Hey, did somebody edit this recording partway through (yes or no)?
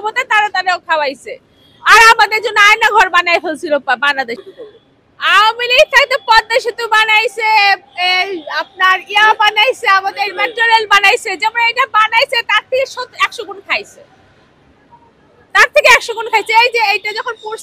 yes